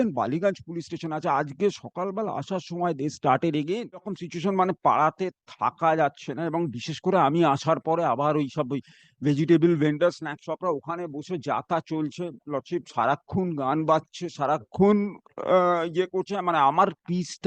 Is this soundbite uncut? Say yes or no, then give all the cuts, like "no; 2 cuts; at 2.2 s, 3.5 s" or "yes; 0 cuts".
no; 1 cut; at 4.3 s